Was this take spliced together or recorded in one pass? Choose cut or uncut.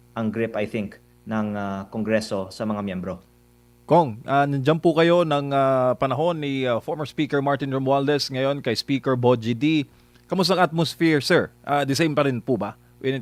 uncut